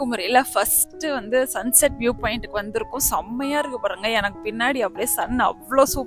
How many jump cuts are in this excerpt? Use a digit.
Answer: 0